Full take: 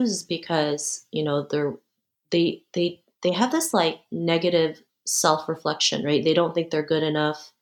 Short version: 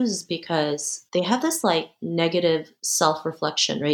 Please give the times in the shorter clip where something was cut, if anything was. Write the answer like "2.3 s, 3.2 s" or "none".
1.0 s, 2.8 s

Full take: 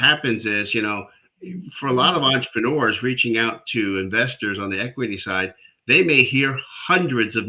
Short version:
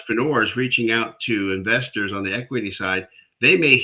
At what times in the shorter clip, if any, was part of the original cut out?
none

